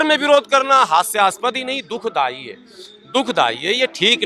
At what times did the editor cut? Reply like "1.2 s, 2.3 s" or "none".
none